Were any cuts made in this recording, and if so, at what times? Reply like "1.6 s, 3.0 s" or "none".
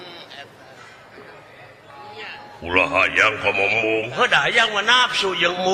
none